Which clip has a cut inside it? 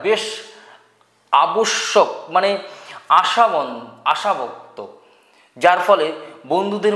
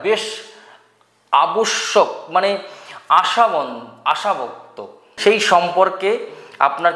second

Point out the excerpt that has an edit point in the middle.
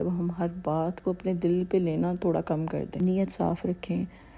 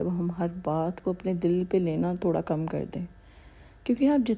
first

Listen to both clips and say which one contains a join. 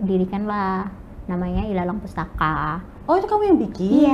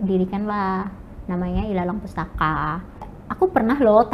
second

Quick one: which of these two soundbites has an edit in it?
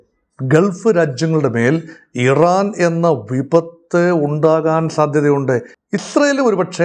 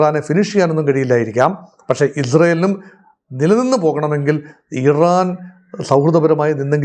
first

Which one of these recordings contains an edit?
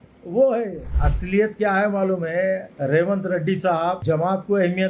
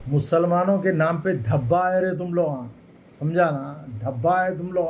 first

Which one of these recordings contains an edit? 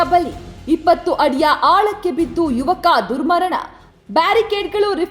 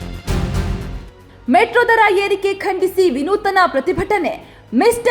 second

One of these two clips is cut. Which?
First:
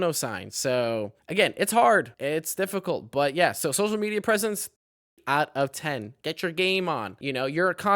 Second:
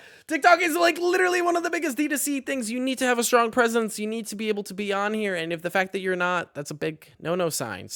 first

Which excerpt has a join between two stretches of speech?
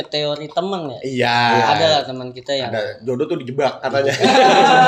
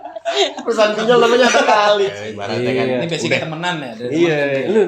second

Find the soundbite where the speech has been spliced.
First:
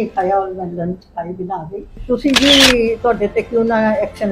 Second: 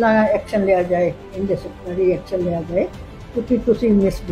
first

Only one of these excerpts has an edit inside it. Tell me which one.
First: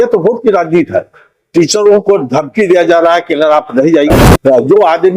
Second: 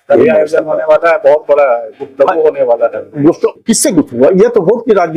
first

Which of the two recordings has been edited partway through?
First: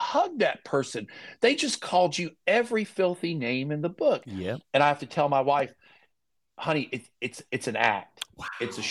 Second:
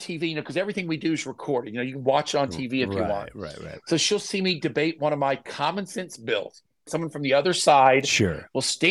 second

